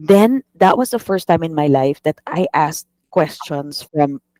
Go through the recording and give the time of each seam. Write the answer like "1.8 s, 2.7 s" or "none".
none